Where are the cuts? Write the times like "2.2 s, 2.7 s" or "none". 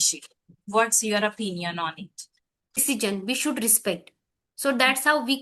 2.7 s